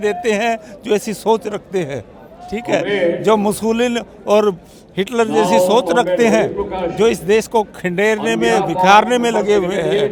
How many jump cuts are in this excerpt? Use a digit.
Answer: 0